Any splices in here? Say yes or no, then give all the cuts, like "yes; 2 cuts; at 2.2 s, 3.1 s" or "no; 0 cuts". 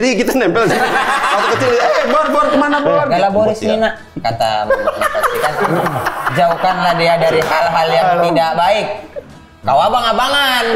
yes; 1 cut; at 3.1 s